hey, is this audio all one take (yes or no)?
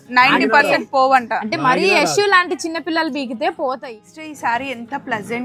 no